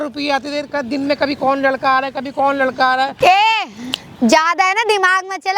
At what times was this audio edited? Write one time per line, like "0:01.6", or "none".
0:03.1